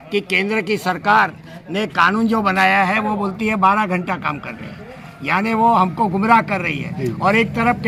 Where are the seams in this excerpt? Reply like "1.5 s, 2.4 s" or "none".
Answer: none